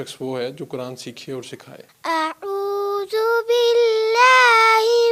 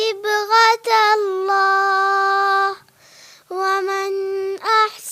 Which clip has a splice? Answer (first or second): first